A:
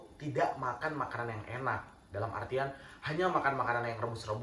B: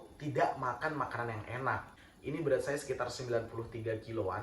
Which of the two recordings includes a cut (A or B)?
B